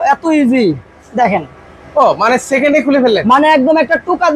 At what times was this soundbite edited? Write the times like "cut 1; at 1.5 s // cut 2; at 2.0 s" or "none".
none